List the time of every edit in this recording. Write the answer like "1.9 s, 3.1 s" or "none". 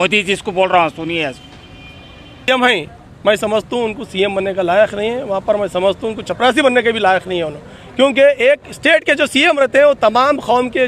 2.5 s